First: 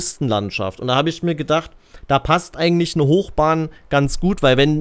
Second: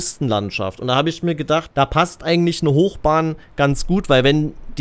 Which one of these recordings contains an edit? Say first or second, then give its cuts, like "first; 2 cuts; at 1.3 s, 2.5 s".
second; 1 cut; at 1.7 s